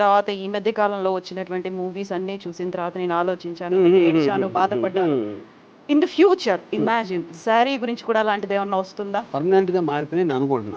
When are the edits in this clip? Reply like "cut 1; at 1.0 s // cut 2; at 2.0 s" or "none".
cut 1; at 9.3 s